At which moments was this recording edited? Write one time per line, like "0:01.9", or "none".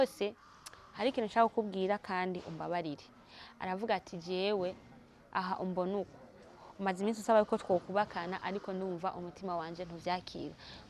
none